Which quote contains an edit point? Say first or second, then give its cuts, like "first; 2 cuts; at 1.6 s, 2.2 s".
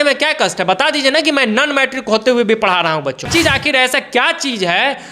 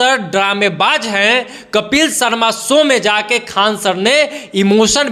first; 1 cut; at 3.3 s